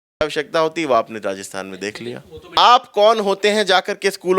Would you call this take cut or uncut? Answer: cut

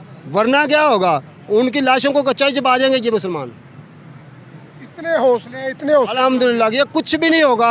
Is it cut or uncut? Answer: uncut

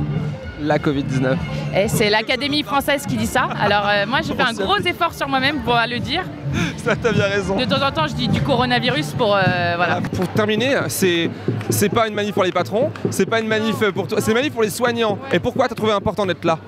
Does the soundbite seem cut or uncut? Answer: uncut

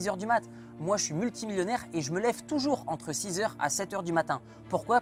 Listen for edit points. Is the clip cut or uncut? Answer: uncut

